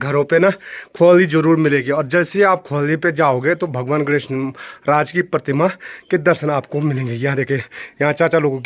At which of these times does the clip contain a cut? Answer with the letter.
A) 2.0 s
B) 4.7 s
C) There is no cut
C